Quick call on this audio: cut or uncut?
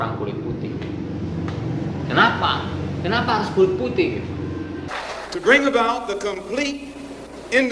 cut